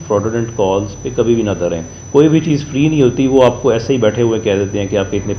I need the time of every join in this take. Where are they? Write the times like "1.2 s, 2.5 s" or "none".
none